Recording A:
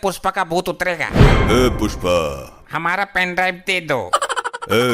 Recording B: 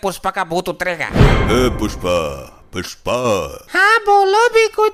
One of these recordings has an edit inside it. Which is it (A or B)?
A